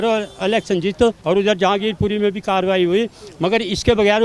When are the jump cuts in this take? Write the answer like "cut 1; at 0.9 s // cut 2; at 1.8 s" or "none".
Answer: cut 1; at 1.2 s